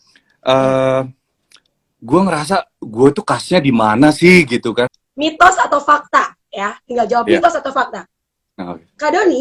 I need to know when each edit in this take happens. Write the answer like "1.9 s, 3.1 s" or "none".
5.0 s